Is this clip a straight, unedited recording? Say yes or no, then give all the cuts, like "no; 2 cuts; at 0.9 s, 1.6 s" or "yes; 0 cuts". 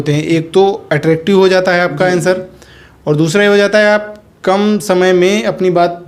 yes; 0 cuts